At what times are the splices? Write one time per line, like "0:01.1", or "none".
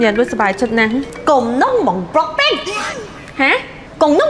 0:01.1